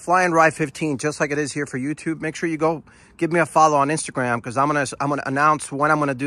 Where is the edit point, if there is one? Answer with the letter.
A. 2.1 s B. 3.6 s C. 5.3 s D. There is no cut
D